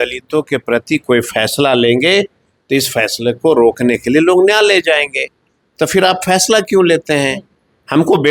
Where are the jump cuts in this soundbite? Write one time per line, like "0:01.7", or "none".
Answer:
none